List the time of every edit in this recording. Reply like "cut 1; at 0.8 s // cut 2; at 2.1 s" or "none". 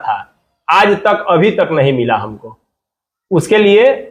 none